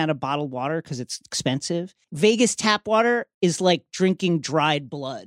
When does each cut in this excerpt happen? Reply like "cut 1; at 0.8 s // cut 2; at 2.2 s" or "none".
cut 1; at 2.0 s // cut 2; at 3.3 s